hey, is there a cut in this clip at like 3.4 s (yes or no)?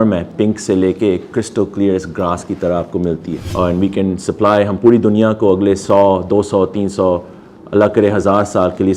yes